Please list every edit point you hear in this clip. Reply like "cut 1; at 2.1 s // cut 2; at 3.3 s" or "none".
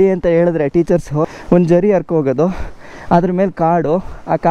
cut 1; at 1.3 s